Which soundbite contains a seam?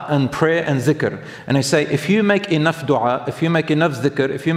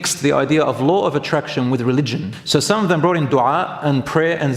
second; 1 cut; at 2.3 s

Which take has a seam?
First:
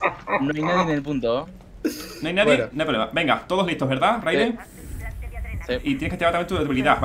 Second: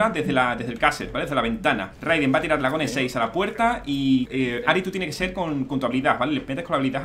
second; 2 cuts; at 1.9 s, 4.3 s

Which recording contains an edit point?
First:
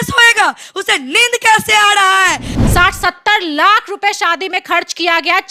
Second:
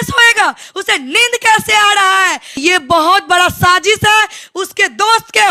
first; 1 cut; at 2.4 s

